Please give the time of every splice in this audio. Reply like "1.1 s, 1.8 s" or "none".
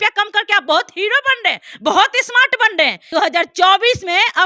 3.0 s